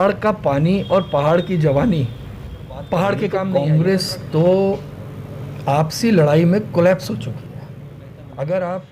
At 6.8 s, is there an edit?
no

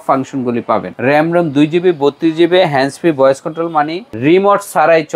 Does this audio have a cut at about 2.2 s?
no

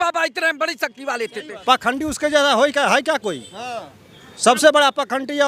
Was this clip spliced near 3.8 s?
no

